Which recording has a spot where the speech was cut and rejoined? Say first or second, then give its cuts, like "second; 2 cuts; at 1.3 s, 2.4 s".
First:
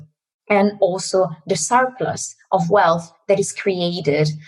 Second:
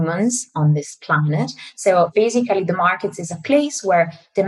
second; 1 cut; at 2.1 s